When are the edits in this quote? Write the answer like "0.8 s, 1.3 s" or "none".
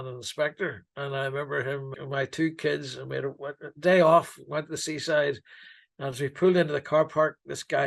1.9 s